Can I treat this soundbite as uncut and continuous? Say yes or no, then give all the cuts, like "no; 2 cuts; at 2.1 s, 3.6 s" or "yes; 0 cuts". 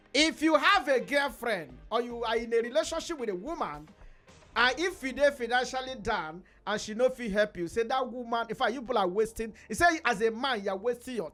yes; 0 cuts